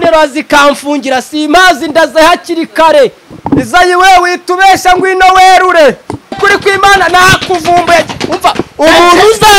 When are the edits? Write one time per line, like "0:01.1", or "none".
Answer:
0:03.3
0:06.4